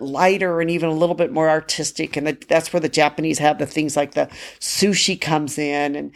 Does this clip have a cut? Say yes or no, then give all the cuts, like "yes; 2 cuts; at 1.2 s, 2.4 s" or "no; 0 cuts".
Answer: no; 0 cuts